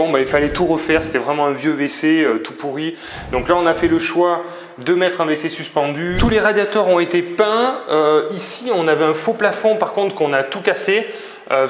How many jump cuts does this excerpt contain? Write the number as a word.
one